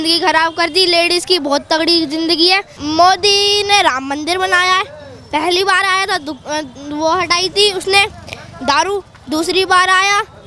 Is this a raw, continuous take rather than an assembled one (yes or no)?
yes